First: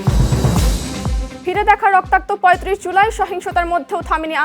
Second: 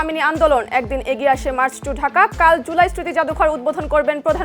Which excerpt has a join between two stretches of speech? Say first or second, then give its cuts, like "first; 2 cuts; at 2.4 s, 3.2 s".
first; 1 cut; at 1.3 s